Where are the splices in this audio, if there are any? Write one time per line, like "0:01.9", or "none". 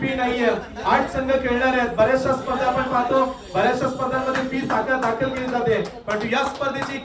none

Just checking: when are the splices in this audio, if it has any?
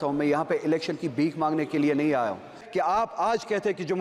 0:02.6

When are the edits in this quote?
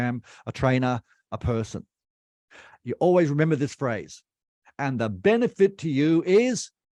none

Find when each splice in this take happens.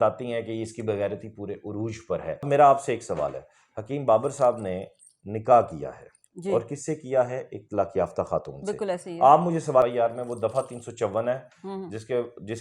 0:02.5
0:09.8

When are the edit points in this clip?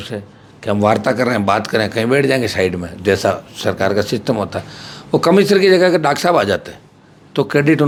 none

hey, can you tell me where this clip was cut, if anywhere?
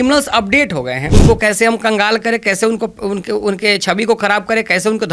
0:01.1

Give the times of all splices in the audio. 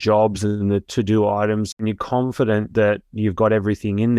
0:01.8

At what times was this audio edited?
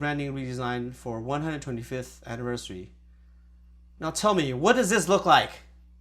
none

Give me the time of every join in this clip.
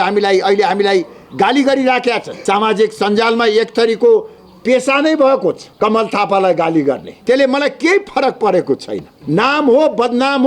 0:02.3
0:05.7
0:07.1
0:09.1

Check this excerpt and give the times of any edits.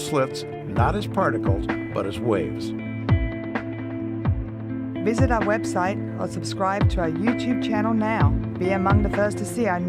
0:04.7

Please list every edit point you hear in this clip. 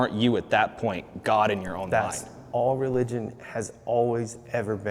0:01.8

